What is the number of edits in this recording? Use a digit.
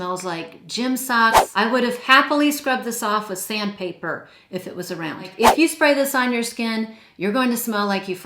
2